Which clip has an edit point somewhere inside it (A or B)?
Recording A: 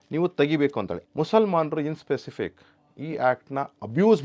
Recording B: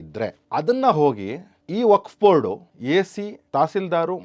A